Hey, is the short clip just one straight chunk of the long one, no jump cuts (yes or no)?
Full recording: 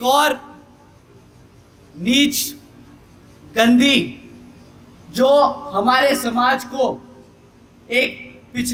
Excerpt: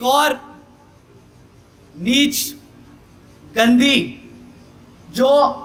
yes